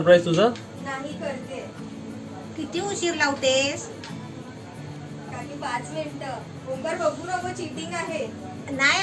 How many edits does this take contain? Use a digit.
1